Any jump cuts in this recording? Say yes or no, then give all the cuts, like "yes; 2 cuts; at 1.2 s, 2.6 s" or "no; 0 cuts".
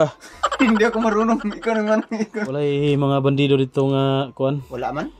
yes; 1 cut; at 2.5 s